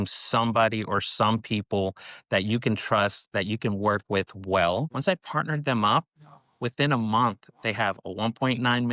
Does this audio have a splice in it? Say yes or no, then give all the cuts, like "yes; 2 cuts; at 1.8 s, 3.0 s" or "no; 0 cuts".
yes; 1 cut; at 4.9 s